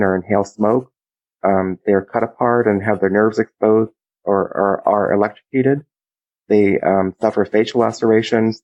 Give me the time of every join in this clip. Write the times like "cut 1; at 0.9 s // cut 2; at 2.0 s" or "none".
none